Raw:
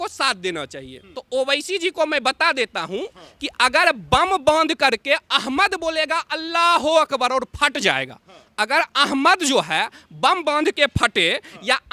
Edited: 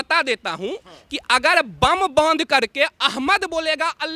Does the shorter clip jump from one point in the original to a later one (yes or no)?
no